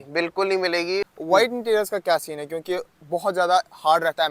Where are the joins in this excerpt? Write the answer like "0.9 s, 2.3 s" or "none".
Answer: 1.1 s